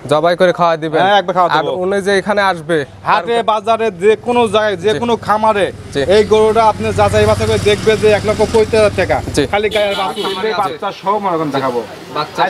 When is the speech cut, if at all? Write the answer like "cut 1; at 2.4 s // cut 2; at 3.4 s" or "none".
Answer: cut 1; at 10.2 s